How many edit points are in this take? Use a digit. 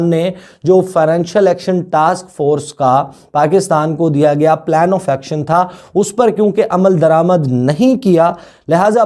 0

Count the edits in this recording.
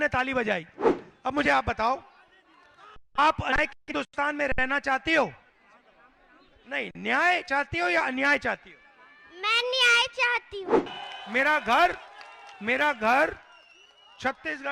2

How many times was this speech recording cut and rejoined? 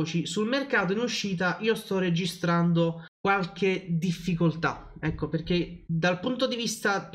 2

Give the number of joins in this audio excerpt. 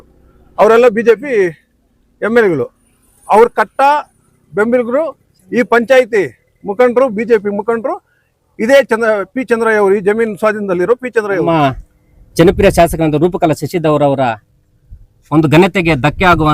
1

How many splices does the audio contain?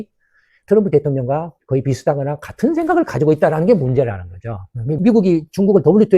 1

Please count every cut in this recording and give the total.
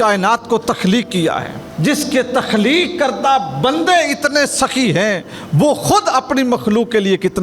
0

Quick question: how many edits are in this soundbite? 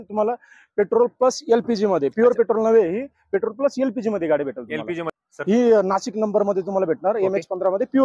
1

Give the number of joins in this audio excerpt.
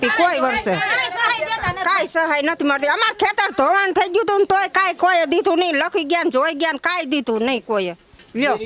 0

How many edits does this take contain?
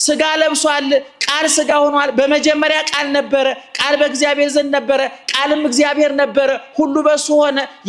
0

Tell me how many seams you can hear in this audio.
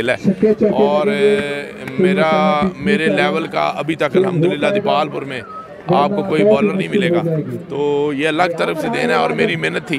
0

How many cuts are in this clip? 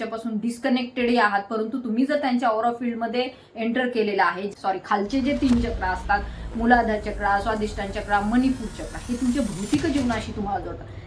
1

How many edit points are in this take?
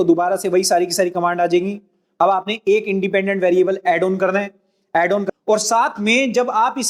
1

